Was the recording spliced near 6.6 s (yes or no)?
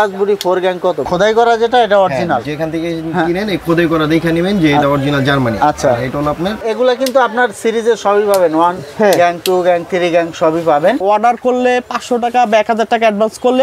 yes